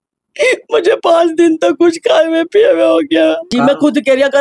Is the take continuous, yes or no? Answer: no